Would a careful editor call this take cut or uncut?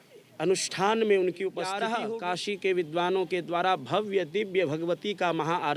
cut